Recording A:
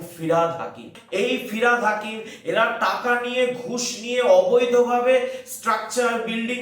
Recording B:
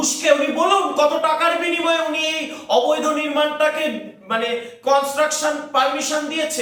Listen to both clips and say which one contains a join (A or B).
A